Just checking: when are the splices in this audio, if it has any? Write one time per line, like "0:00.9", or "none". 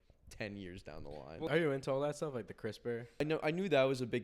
0:01.5
0:03.2